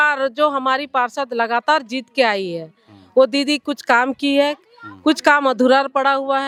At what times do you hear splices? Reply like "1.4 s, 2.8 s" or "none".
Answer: none